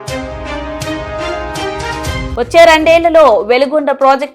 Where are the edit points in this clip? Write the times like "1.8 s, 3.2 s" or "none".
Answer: 2.2 s